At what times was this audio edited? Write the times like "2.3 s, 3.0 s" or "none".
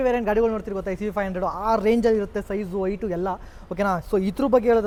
none